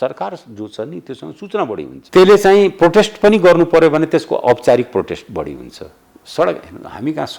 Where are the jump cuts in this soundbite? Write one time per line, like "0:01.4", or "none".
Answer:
0:01.9